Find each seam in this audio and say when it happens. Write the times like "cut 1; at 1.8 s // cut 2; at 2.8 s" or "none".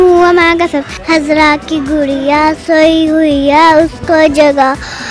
cut 1; at 0.9 s